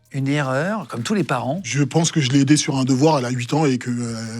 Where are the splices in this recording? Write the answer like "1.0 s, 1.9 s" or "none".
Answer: 1.7 s